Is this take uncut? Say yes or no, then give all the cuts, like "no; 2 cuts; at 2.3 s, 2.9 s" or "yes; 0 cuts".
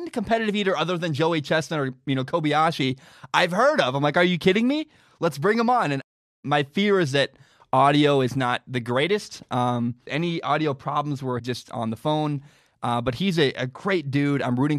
no; 3 cuts; at 6.3 s, 10.1 s, 11.4 s